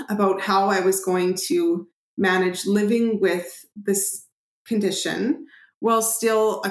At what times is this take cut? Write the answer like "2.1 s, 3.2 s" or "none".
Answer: none